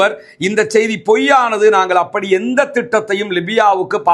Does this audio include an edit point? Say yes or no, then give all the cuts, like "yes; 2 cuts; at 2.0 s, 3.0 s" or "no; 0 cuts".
no; 0 cuts